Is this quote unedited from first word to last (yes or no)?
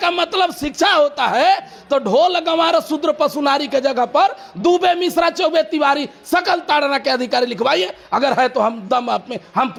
yes